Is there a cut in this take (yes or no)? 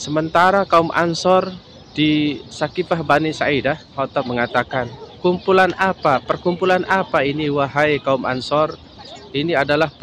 yes